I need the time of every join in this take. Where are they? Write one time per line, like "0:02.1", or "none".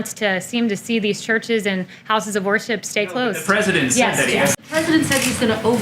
0:04.6